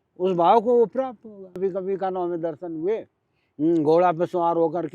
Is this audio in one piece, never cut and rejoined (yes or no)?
no